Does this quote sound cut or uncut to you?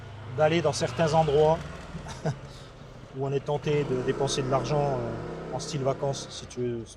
uncut